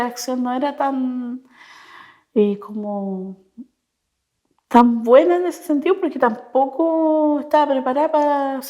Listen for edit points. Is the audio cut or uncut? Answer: uncut